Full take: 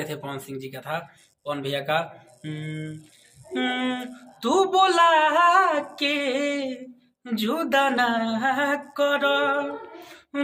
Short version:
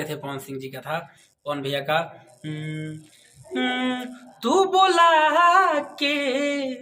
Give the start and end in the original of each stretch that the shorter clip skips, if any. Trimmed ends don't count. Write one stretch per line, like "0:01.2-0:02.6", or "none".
none